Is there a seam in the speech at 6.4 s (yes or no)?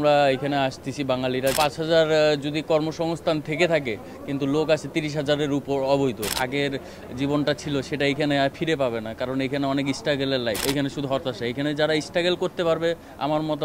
yes